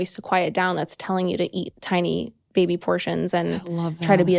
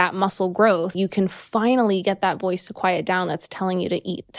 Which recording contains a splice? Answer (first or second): second